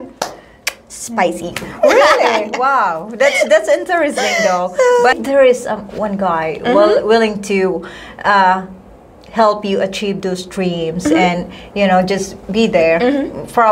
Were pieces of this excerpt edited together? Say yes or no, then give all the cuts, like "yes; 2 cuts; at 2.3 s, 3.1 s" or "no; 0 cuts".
yes; 1 cut; at 5.1 s